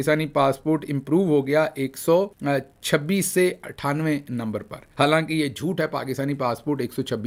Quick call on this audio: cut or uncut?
uncut